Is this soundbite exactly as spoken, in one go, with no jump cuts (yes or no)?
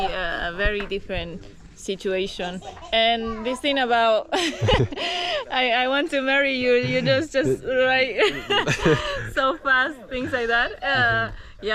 yes